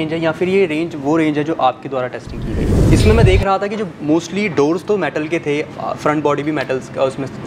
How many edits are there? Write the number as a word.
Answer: one